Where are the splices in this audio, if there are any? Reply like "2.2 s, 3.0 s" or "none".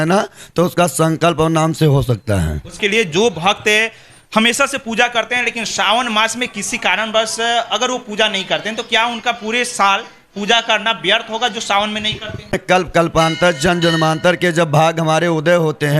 2.8 s, 12.6 s